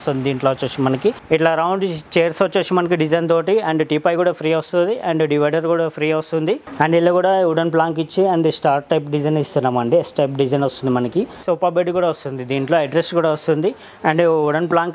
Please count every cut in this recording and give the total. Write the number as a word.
three